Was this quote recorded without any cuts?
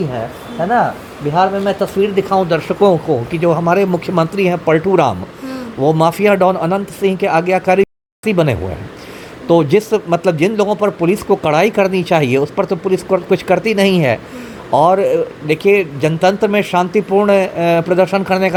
yes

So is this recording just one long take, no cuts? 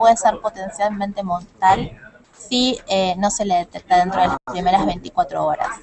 yes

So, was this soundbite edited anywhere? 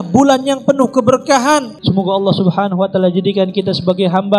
yes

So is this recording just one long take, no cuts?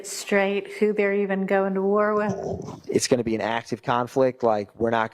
no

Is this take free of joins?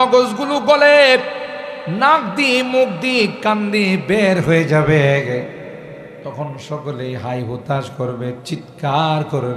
no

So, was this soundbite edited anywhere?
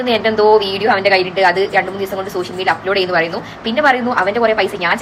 no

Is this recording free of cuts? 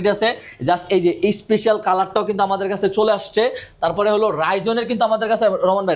yes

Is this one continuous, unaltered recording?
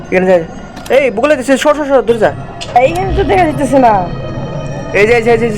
no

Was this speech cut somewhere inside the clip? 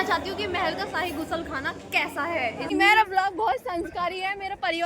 yes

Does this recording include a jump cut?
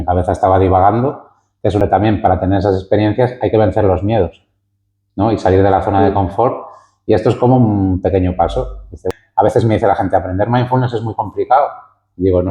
yes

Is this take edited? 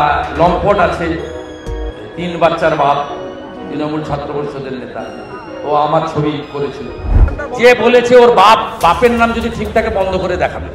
yes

